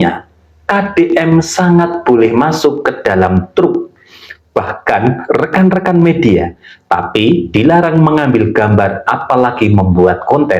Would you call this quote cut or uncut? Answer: uncut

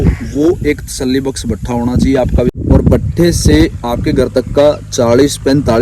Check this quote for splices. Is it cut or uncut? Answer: cut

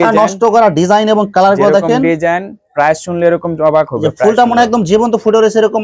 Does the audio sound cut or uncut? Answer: uncut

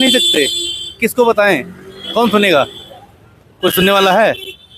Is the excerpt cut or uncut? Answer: uncut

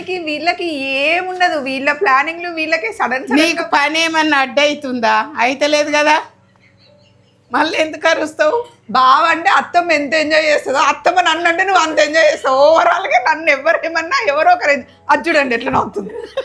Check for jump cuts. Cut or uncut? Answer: uncut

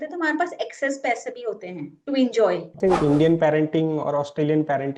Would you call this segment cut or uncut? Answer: cut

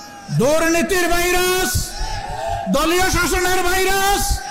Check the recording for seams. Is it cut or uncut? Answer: uncut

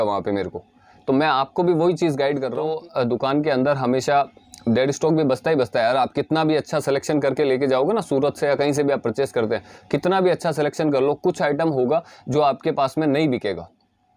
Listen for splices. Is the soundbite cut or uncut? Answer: cut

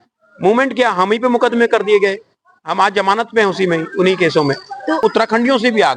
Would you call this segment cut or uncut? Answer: cut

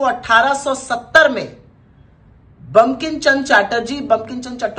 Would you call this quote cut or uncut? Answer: uncut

